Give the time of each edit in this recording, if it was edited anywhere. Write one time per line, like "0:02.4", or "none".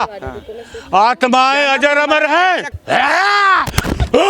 0:02.7